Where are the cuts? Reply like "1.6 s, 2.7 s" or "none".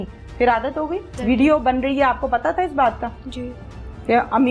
1.2 s

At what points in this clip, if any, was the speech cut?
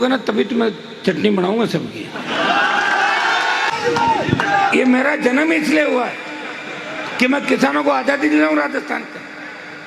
3.7 s

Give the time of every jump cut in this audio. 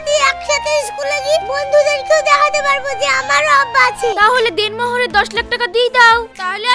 4.1 s

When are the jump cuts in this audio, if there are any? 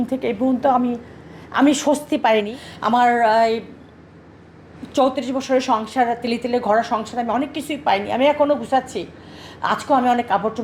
2.6 s

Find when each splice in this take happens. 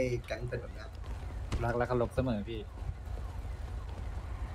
none

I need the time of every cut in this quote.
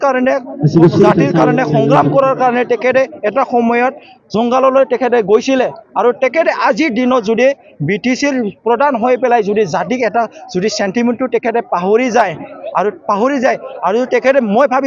none

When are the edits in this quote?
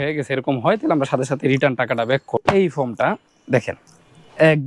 2.4 s

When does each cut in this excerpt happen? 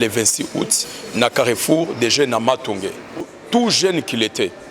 3.2 s

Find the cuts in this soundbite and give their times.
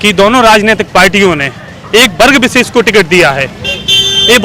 none

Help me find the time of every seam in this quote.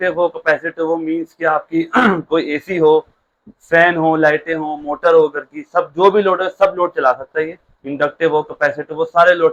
none

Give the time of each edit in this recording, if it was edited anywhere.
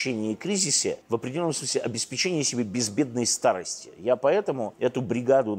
4.7 s

